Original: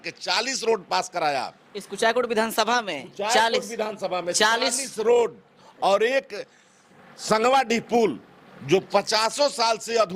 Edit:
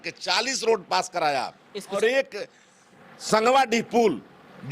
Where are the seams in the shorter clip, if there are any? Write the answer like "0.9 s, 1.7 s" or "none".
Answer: 2.0 s

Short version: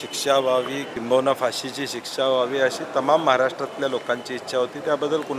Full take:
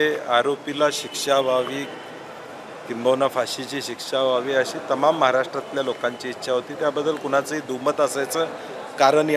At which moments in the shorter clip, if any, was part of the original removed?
0.9 s

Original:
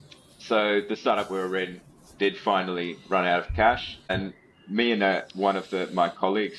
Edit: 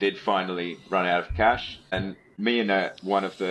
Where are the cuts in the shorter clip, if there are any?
1.9 s

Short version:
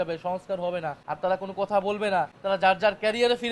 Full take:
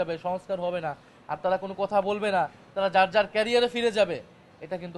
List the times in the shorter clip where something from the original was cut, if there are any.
1.0 s, 2.4 s

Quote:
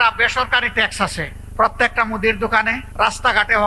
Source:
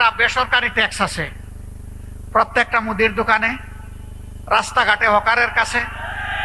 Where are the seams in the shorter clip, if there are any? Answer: 1.4 s, 2.8 s

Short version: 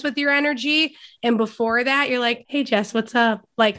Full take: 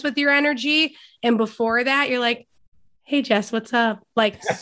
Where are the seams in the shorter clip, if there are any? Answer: 2.4 s

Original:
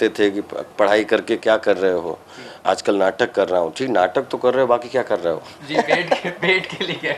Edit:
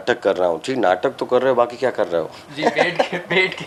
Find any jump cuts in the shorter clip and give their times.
none

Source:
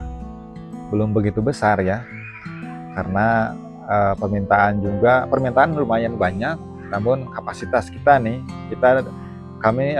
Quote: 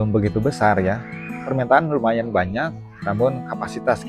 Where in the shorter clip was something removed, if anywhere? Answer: 1.5 s

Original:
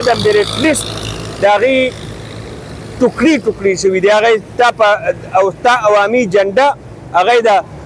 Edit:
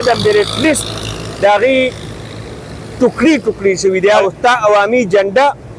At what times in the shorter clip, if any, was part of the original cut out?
4.2 s

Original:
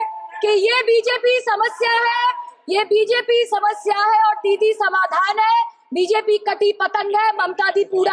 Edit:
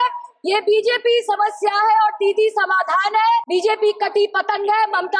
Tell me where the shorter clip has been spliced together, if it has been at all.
3.4 s

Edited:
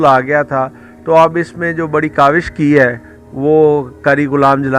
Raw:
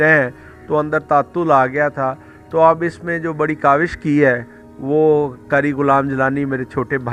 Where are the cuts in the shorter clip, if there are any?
none

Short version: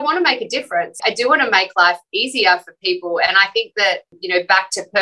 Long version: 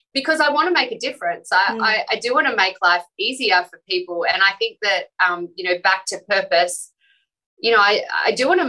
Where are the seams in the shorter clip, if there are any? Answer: 1.0 s, 4.1 s

